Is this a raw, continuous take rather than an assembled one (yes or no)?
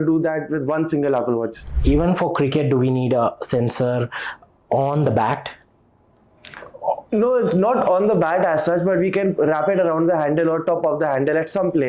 no